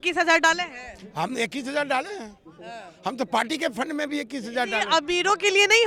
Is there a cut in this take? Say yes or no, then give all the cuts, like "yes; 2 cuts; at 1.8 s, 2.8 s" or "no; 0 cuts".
no; 0 cuts